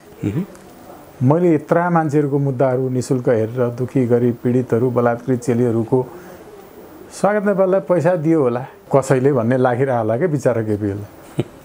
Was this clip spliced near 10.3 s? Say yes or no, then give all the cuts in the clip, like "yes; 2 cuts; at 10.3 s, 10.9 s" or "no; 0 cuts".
no; 1 cut; at 8.7 s